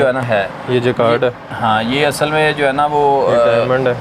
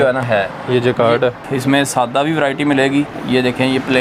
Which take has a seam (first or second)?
second